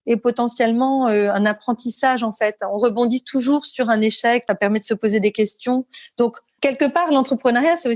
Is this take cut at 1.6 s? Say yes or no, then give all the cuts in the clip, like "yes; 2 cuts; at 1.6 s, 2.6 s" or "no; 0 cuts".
no; 2 cuts; at 4.4 s, 6.5 s